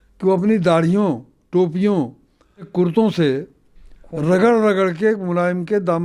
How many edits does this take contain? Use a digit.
1